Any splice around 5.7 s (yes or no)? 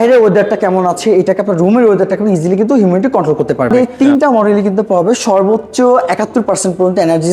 no